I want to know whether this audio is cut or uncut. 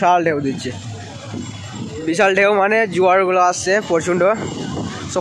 uncut